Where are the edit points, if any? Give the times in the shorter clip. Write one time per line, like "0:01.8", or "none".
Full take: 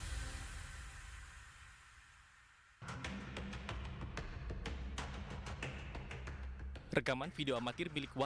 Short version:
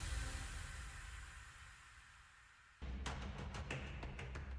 0:02.8